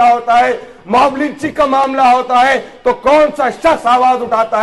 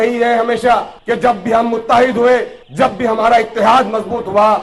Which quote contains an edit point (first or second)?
second